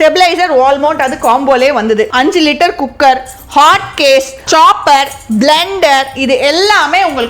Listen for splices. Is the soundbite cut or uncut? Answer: cut